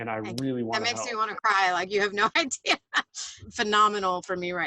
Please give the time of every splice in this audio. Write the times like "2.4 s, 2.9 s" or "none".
3.3 s